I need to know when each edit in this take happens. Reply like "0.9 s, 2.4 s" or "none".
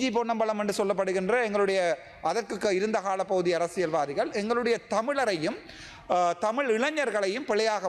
none